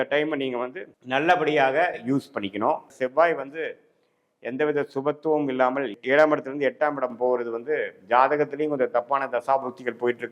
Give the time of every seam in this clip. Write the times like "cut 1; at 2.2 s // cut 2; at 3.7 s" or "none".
cut 1; at 2.9 s

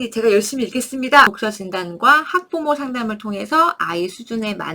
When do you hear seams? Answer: cut 1; at 1.3 s

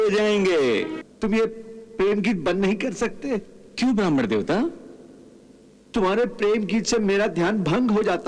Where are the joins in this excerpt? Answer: cut 1; at 0.9 s

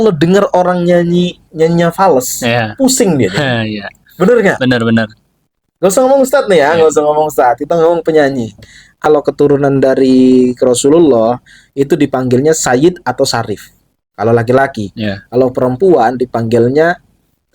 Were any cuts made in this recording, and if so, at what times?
cut 1; at 9.0 s

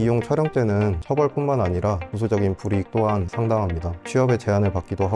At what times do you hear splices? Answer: cut 1; at 1.0 s // cut 2; at 3.3 s

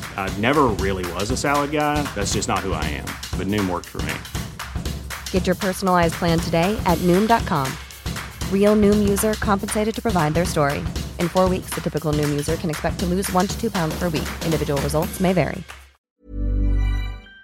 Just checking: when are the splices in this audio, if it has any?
cut 1; at 16.1 s

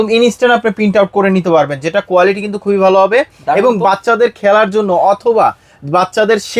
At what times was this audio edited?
none

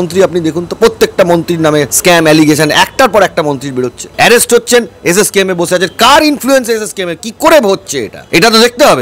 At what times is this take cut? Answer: cut 1; at 1.9 s // cut 2; at 4.0 s // cut 3; at 8.2 s

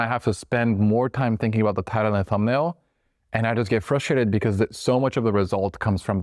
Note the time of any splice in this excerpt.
none

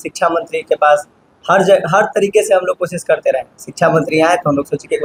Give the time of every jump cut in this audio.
none

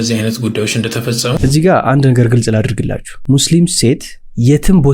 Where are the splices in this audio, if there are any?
cut 1; at 1.3 s // cut 2; at 3.1 s

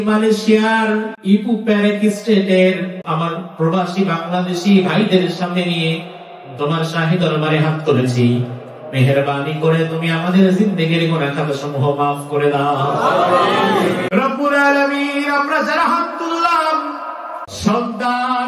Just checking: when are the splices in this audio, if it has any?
cut 1; at 1.1 s // cut 2; at 3.0 s // cut 3; at 14.1 s // cut 4; at 17.4 s

